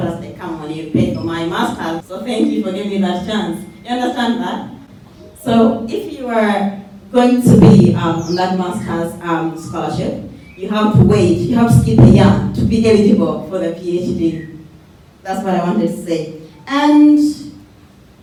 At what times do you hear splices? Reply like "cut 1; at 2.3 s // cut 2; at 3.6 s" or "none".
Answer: none